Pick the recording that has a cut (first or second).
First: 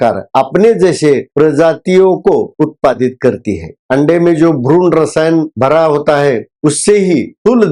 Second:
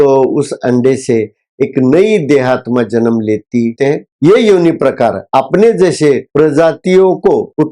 second